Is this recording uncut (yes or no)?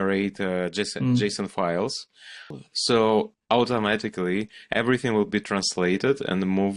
no